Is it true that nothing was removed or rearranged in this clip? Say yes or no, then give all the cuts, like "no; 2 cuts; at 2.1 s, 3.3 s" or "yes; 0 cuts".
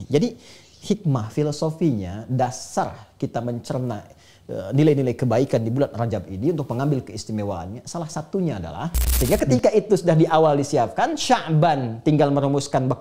no; 1 cut; at 9.0 s